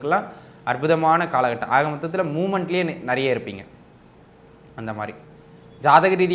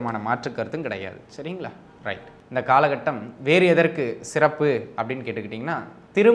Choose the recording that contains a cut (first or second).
second